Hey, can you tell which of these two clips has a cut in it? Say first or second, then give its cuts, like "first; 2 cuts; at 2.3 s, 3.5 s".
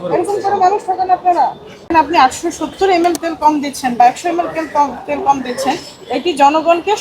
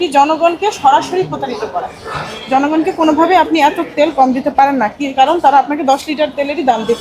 first; 1 cut; at 1.8 s